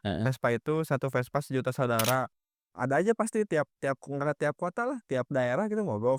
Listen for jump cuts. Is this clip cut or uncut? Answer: cut